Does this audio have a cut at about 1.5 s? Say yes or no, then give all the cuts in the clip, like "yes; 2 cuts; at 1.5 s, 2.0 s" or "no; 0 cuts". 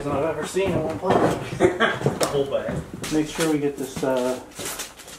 no; 1 cut; at 3.0 s